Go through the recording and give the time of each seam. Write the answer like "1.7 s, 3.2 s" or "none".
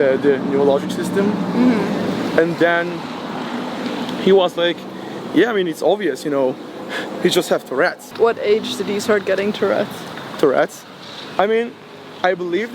none